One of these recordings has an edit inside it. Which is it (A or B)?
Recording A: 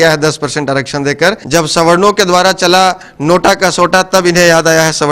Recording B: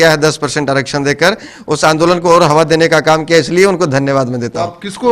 A